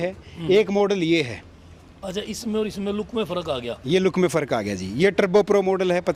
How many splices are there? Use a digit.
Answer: 0